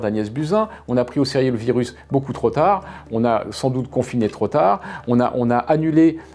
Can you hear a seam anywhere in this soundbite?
no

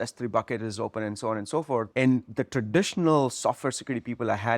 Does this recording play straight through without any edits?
no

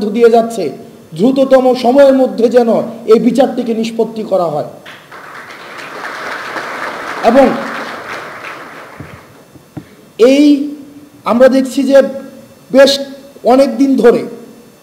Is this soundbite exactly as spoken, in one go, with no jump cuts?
yes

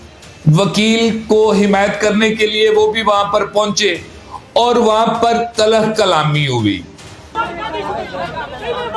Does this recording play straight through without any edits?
yes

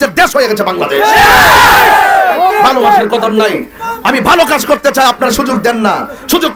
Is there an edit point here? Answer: no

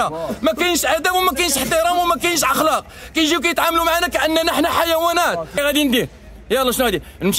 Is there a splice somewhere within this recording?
yes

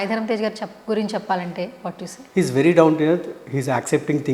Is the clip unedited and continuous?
no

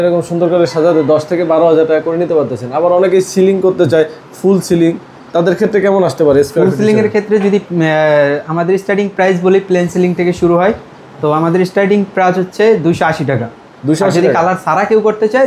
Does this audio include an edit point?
no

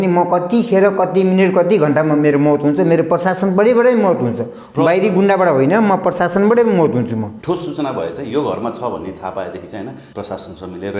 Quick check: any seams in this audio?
yes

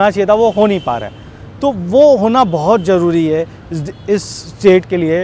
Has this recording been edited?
no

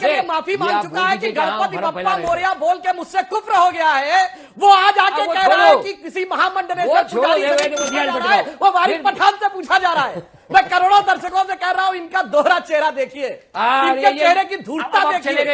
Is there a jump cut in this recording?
no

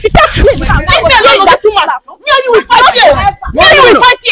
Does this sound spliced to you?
no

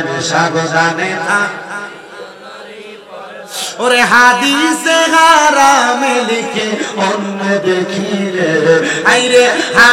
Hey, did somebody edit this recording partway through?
no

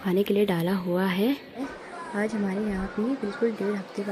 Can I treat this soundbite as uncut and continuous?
no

